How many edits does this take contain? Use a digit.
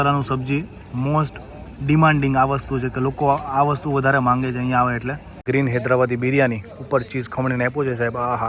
1